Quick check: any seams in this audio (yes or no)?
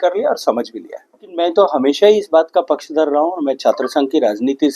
yes